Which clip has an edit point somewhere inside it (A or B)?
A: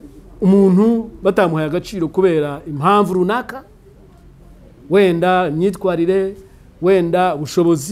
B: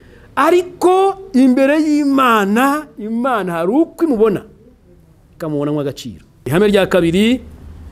B